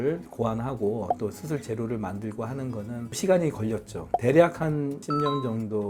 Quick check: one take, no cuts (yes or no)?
yes